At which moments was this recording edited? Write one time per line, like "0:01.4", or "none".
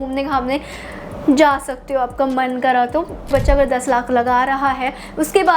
0:03.3